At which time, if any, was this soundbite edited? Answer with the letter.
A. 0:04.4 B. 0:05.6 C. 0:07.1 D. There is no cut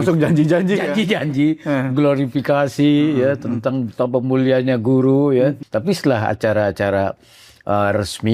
B